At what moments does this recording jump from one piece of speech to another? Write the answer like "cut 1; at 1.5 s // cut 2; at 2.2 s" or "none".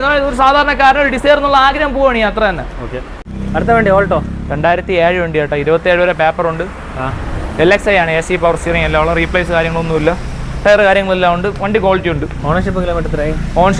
none